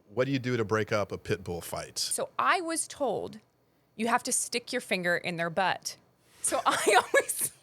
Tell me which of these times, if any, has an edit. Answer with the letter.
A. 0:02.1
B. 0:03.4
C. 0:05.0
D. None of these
A